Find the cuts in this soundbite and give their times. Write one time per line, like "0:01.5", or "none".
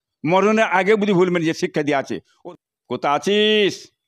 0:02.2